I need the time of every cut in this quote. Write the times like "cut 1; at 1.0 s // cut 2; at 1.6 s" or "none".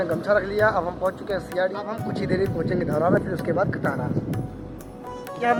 none